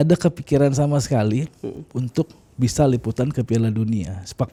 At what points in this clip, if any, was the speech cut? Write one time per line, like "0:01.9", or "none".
none

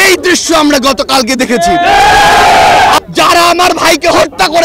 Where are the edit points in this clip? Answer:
0:03.0

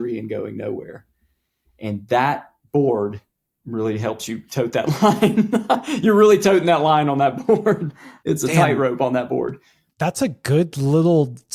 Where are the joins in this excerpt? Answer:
0:08.1

